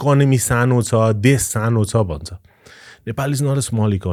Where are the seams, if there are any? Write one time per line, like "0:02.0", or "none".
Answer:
none